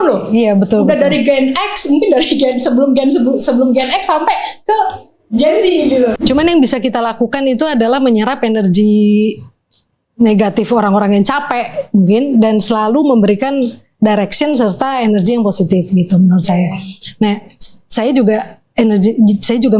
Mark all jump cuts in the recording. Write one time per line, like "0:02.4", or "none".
0:06.2